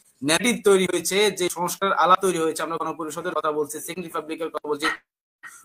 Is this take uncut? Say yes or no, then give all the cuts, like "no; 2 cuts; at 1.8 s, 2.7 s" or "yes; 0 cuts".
yes; 0 cuts